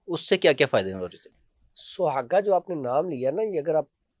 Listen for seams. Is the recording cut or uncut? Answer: uncut